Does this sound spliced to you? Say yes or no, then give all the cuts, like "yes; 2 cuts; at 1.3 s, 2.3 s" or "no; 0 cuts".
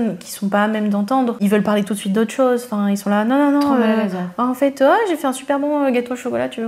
no; 0 cuts